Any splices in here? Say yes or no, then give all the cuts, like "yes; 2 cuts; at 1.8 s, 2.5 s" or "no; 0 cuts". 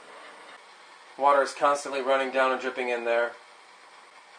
yes; 1 cut; at 1.2 s